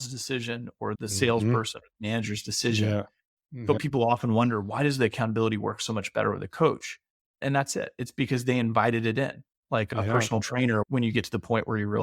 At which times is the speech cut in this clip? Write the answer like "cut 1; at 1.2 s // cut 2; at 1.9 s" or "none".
cut 1; at 3.8 s